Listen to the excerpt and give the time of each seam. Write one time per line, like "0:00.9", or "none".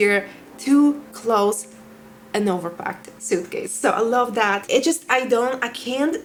none